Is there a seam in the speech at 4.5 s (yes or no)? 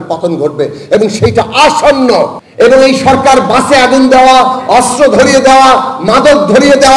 no